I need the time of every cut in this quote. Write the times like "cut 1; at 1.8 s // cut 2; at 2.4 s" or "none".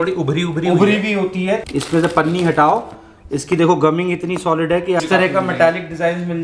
cut 1; at 1.6 s // cut 2; at 5.0 s